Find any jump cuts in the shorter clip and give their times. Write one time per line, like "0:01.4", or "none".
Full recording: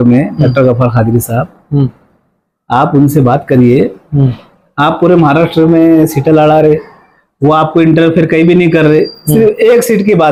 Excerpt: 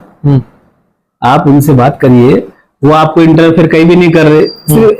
0:02.6